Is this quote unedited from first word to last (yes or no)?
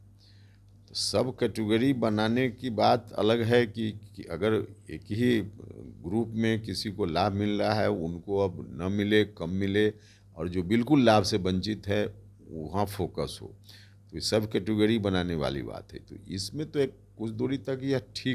yes